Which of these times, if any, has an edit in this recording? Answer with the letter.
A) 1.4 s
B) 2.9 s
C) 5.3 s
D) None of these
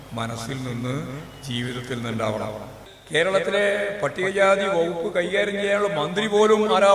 B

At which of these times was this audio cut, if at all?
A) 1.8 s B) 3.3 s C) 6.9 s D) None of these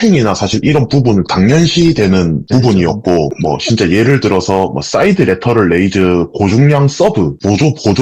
B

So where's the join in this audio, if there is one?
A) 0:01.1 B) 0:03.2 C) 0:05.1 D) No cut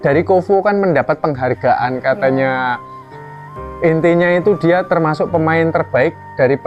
D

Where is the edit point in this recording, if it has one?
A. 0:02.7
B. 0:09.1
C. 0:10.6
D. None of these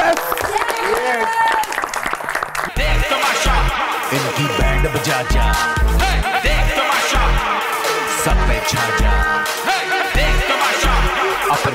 A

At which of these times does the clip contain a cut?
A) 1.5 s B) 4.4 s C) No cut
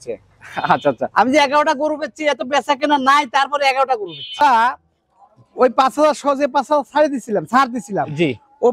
B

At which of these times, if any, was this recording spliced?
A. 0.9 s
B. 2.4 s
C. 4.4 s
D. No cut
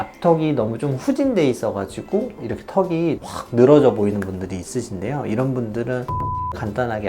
B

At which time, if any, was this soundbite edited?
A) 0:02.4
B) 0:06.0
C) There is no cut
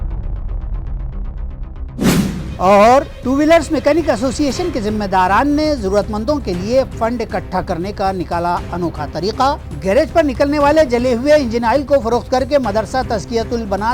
A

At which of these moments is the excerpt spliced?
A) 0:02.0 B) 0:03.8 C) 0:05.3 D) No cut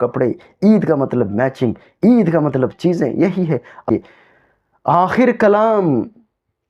B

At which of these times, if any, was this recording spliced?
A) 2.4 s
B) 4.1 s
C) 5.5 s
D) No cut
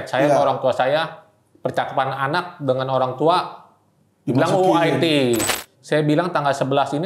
C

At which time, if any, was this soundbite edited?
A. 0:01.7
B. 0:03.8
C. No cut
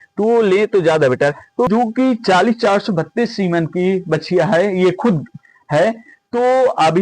A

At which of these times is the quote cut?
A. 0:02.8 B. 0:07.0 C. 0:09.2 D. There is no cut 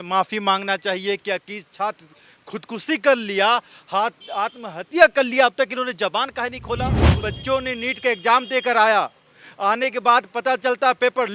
B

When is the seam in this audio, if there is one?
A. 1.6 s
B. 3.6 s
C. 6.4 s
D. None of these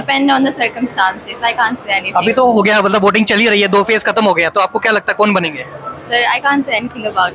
D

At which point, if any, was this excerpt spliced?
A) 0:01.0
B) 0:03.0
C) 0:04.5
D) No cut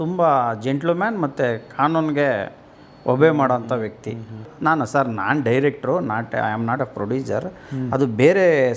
C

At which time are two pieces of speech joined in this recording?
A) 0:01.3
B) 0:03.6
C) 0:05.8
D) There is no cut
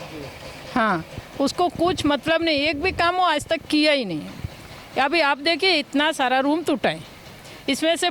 D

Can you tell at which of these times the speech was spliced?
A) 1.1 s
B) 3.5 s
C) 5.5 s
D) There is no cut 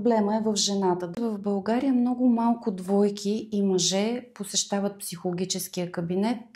A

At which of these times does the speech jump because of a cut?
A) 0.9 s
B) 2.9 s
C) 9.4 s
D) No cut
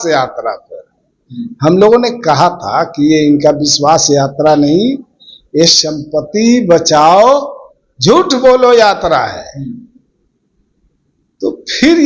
D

